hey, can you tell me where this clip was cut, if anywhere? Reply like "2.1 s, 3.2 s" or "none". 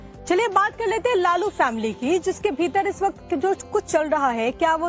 2.5 s